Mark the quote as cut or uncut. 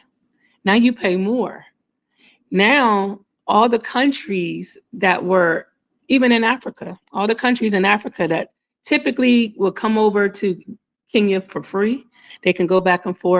cut